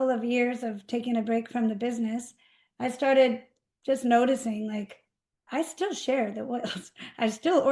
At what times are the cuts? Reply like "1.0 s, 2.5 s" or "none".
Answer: none